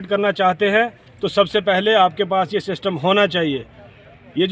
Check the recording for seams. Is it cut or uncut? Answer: uncut